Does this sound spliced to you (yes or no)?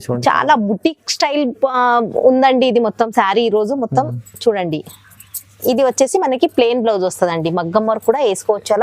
no